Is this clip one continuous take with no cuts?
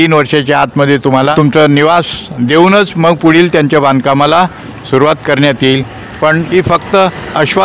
no; 2 cuts; at 1.3 s, 6.1 s

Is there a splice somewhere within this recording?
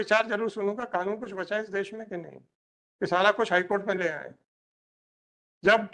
no; 0 cuts

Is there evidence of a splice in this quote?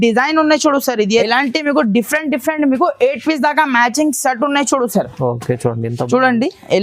yes; 1 cut; at 1.2 s

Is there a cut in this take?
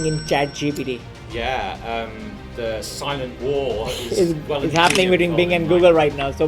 no; 0 cuts

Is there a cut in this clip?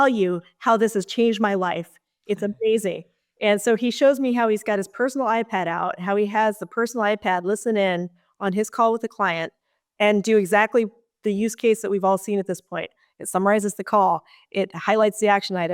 no; 0 cuts

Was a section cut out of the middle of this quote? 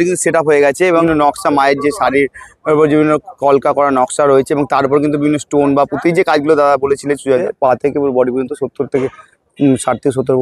yes; 2 cuts; at 1.0 s, 7.4 s

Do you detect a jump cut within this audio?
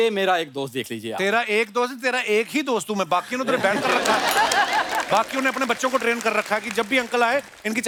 no; 0 cuts

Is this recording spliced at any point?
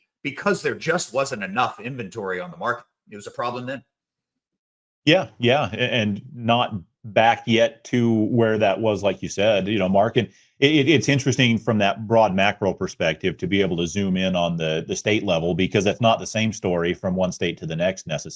no; 0 cuts

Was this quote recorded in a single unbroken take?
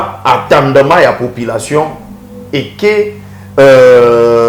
yes; 0 cuts

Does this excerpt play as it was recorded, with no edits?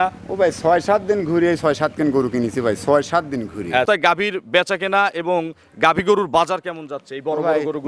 no; 1 cut; at 3.9 s

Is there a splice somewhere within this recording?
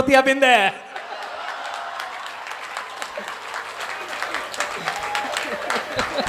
no; 0 cuts

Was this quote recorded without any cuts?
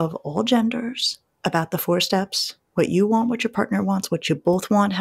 yes; 0 cuts

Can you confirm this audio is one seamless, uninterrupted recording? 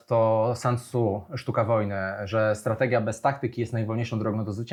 yes; 0 cuts

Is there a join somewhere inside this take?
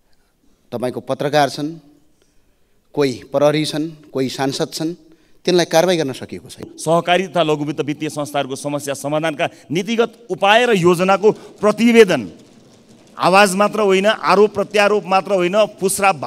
yes; 1 cut; at 6.7 s

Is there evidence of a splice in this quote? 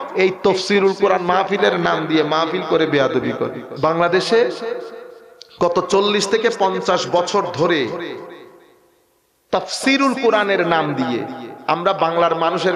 yes; 1 cut; at 3.6 s

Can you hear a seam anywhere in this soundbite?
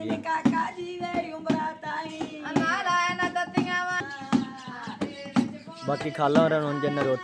yes; 1 cut; at 4.1 s

